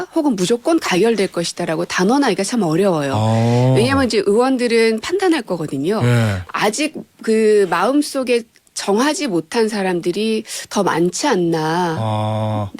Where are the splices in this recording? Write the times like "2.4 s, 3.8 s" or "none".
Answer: 6.4 s